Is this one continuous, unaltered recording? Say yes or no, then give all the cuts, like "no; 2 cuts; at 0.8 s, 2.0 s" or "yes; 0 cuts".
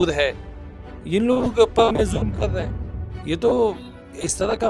yes; 0 cuts